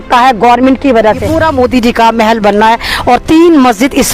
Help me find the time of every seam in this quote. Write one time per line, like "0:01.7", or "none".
0:01.3